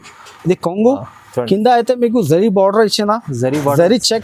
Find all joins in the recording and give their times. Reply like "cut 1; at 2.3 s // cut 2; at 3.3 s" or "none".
none